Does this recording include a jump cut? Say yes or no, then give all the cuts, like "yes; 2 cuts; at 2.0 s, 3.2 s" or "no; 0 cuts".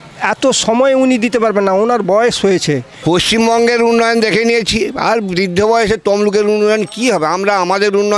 yes; 1 cut; at 2.9 s